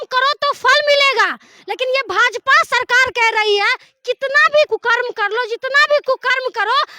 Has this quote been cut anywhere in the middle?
yes; 1 cut; at 4.7 s

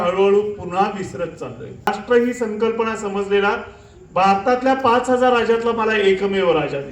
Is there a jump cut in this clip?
yes; 1 cut; at 1.9 s

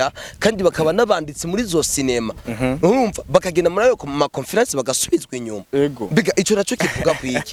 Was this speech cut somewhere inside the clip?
no; 0 cuts

